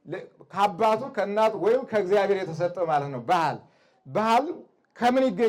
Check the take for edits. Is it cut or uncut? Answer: uncut